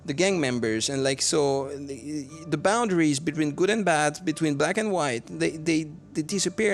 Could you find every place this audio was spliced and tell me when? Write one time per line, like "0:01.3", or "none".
none

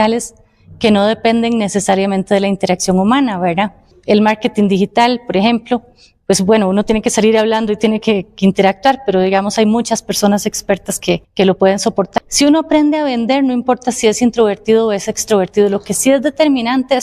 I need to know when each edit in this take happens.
0:03.9
0:11.3
0:12.1

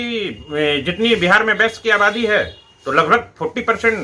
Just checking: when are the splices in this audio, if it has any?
none

